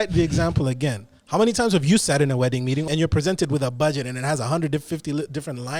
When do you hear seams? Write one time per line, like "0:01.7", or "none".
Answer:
0:02.8